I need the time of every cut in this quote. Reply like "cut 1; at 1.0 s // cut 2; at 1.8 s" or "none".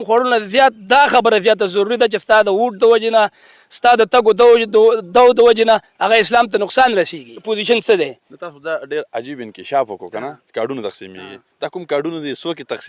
cut 1; at 7.4 s